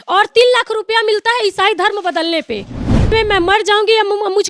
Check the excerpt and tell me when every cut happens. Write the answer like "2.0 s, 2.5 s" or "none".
3.1 s